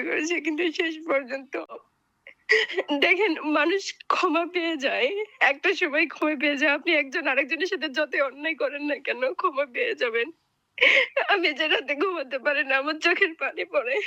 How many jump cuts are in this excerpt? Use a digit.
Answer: 1